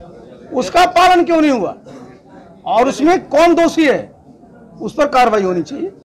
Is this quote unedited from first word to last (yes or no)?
yes